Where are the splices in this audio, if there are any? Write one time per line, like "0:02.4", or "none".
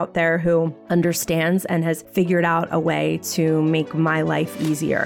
0:02.0